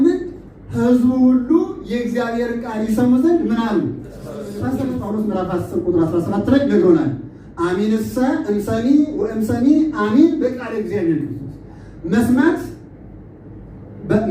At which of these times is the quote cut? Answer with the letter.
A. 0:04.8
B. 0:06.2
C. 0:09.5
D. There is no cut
A